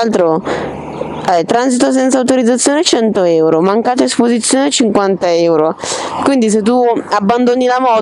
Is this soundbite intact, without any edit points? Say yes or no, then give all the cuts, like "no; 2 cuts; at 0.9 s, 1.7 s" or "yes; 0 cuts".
yes; 0 cuts